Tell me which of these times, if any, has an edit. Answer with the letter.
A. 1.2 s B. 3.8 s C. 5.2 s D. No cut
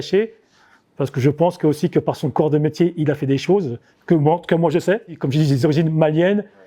C